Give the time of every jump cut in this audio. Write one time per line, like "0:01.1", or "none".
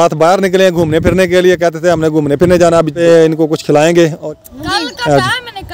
0:03.0
0:04.2